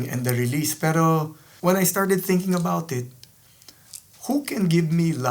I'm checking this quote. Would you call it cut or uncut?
cut